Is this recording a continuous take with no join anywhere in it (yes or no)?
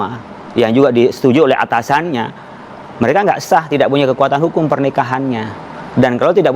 yes